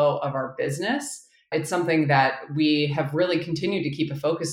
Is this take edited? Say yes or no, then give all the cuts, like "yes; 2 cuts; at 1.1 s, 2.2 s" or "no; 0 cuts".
yes; 1 cut; at 1.5 s